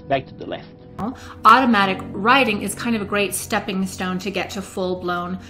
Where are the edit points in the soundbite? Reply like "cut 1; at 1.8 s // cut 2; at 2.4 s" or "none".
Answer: cut 1; at 1.0 s